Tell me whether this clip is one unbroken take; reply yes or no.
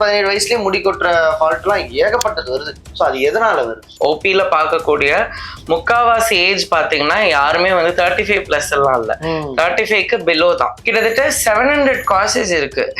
no